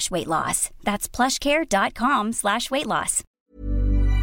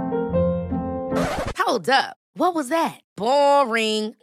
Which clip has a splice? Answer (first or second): first